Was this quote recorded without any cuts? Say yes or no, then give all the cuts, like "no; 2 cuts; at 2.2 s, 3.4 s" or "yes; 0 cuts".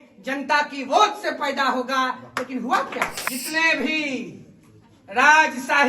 no; 1 cut; at 3.2 s